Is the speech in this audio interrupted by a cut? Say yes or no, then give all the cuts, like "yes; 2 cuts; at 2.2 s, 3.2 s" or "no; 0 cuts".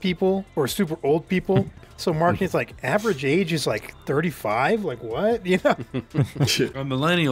no; 0 cuts